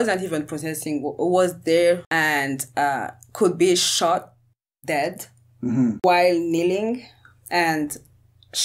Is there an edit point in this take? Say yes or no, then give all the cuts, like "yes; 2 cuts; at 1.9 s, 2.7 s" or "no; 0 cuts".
yes; 2 cuts; at 2.0 s, 6.0 s